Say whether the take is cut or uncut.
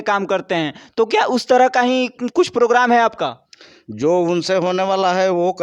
uncut